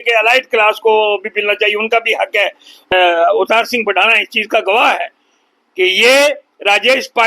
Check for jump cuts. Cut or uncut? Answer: cut